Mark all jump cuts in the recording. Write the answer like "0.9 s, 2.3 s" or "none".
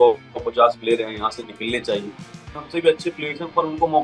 2.6 s